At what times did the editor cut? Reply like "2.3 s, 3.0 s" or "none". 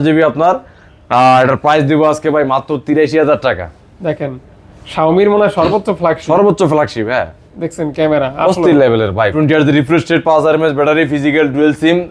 9.3 s